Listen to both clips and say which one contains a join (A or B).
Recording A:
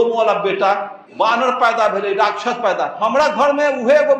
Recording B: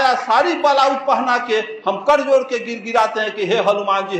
A